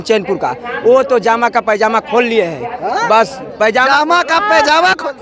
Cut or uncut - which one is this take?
uncut